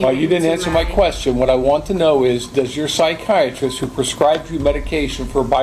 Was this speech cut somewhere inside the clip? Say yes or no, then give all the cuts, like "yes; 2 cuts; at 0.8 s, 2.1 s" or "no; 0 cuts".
no; 0 cuts